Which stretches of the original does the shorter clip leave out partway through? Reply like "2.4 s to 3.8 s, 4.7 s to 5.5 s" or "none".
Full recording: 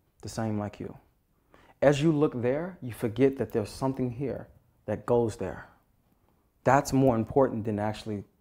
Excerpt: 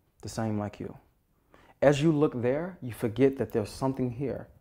none

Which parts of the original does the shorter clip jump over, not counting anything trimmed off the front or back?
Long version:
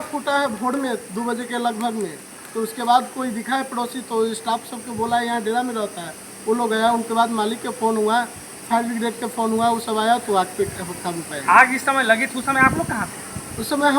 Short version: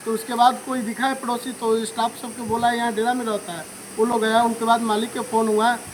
none

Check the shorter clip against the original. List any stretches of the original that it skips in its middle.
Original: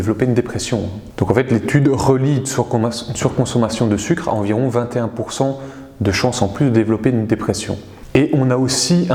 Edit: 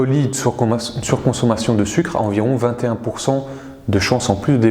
none

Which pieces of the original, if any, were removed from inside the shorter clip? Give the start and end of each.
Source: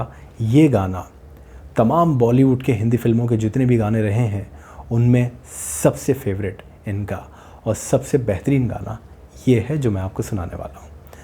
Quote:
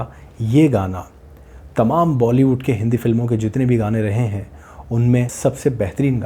5.3 s to 7.8 s

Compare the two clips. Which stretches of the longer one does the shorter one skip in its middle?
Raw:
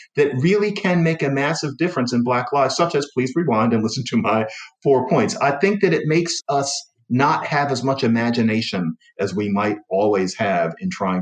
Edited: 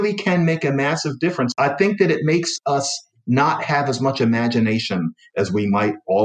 2.1 s to 5.3 s

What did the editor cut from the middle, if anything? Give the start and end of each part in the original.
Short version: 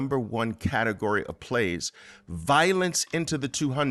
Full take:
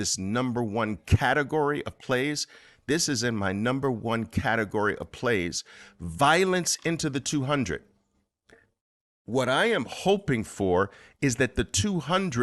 none

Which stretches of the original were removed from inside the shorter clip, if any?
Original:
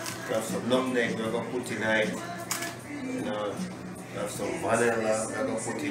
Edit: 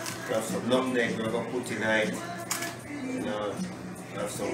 none

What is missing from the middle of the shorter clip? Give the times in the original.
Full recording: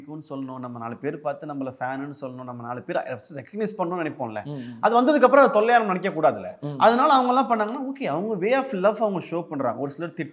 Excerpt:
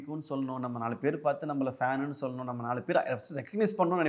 none

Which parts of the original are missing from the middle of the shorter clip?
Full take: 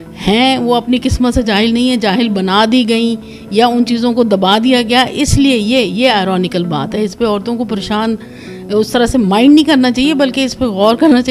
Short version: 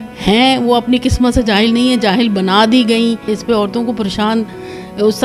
3.3 s to 7.0 s

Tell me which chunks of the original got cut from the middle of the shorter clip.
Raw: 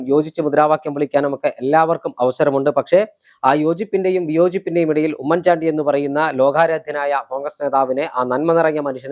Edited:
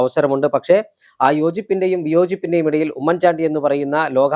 none

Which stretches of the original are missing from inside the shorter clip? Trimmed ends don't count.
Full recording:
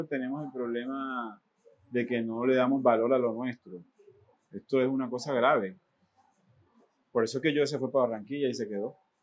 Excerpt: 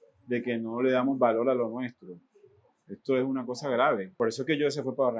5.7 s to 7.0 s

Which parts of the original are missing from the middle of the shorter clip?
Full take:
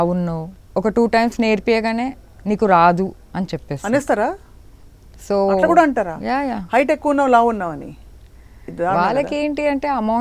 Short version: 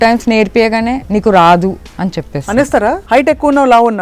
2.1 s to 2.4 s, 4.4 s to 6.6 s

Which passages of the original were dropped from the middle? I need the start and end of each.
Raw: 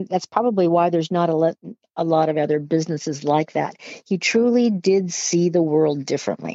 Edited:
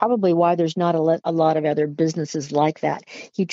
1.6 s to 2.0 s

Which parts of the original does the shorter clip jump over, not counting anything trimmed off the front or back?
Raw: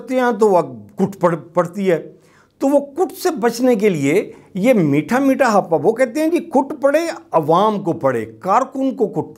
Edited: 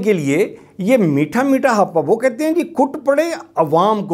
none

